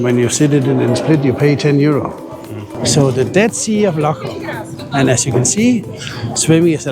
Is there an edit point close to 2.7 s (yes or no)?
yes